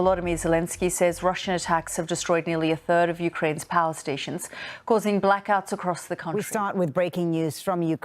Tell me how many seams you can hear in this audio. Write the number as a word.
one